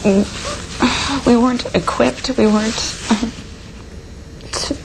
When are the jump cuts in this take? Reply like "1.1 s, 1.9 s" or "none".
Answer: none